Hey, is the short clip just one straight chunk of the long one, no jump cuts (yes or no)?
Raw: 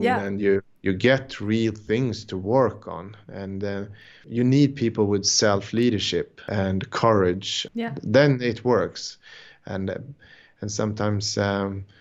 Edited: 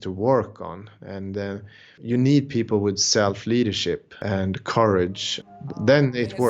yes